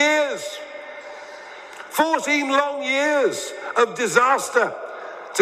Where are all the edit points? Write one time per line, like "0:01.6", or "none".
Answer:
none